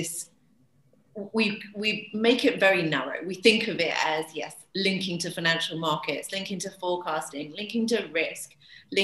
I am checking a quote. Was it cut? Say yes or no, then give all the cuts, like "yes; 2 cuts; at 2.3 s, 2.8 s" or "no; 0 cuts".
no; 0 cuts